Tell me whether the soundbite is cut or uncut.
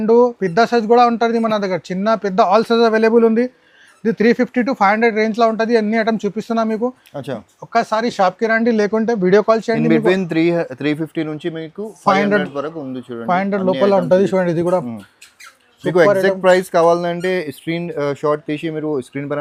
uncut